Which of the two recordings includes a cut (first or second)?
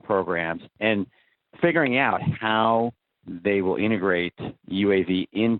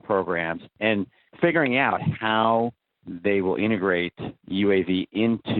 second